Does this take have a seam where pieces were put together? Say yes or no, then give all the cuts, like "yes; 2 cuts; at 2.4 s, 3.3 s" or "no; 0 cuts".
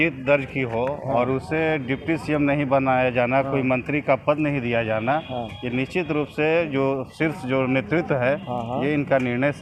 no; 0 cuts